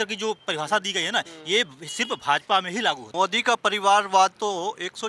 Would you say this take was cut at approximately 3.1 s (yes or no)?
yes